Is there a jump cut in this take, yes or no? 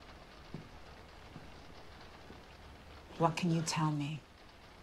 yes